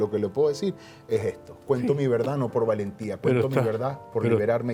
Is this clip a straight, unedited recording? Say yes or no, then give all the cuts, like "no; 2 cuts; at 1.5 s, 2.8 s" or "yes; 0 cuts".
yes; 0 cuts